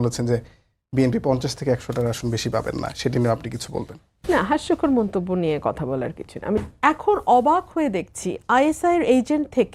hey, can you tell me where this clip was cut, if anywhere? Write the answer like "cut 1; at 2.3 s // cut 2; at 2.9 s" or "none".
cut 1; at 6.6 s